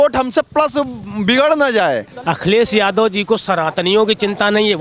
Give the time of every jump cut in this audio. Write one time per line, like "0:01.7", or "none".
0:02.1